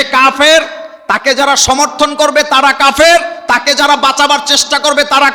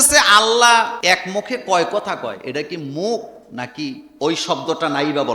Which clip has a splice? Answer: second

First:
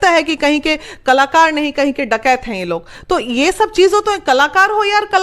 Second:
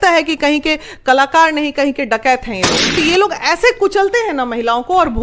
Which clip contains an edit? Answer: second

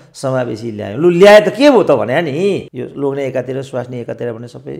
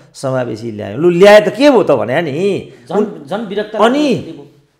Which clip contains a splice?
first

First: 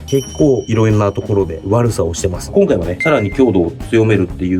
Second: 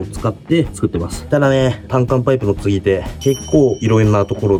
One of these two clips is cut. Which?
first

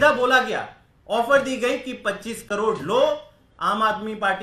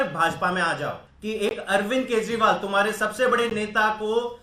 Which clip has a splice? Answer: second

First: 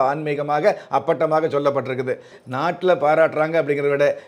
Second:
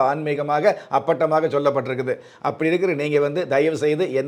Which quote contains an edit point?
first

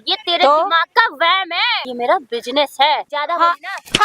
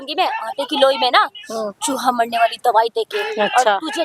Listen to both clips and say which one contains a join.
first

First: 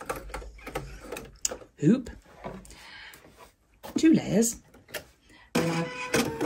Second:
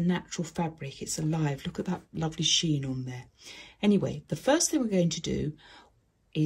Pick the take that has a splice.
first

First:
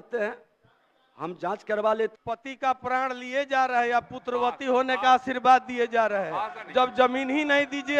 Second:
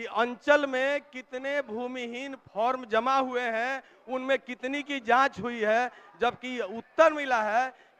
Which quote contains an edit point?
first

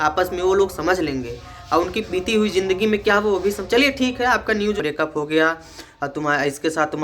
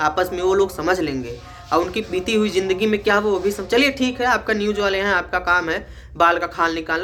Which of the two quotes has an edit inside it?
first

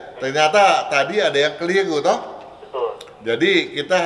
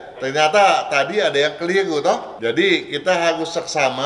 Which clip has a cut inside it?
second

